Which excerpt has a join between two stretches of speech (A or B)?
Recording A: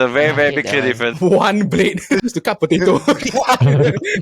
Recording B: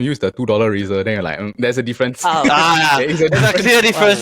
A